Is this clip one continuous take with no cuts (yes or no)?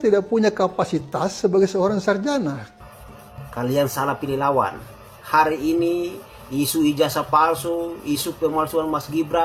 no